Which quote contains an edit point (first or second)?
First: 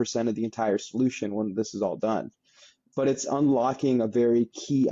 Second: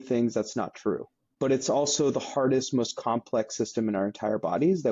second